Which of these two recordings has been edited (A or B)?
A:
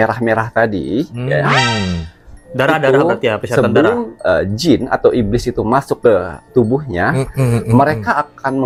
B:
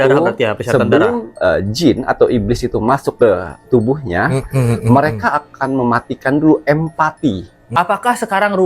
B